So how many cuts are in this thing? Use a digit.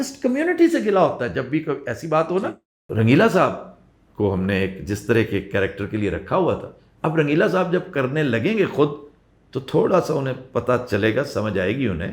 1